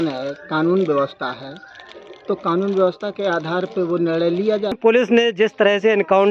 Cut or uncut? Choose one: cut